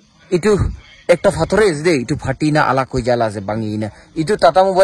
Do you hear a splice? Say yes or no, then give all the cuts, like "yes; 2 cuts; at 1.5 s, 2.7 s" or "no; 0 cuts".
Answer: no; 0 cuts